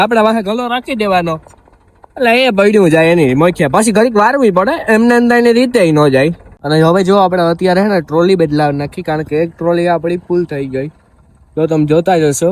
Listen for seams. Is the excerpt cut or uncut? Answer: cut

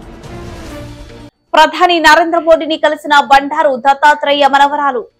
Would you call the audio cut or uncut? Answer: cut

